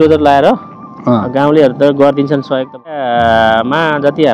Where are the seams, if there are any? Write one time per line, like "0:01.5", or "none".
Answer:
0:03.0